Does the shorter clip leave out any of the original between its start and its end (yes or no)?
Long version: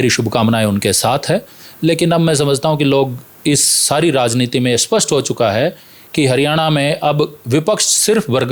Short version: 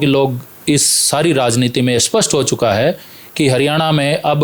no